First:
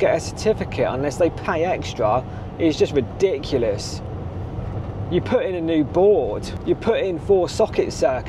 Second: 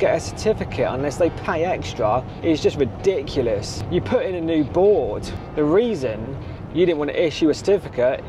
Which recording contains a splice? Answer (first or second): second